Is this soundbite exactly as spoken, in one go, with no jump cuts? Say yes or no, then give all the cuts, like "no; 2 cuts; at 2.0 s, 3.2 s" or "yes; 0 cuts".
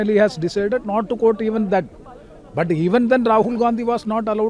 yes; 0 cuts